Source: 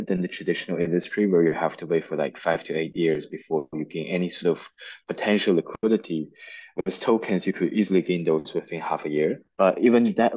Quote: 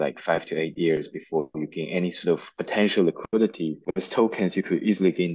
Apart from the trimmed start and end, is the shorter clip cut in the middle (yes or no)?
yes